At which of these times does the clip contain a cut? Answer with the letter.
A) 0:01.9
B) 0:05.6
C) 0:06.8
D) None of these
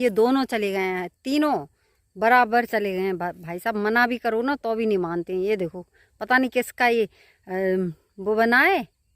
D